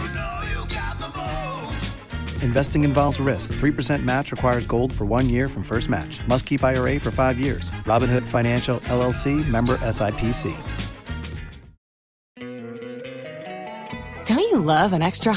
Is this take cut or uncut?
cut